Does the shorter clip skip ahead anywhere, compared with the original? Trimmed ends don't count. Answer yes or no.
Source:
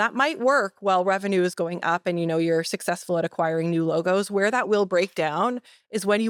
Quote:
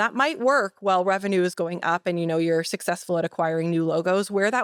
no